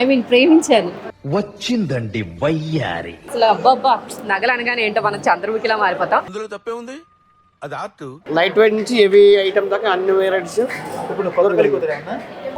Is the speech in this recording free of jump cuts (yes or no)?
no